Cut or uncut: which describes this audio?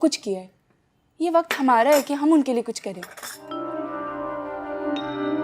cut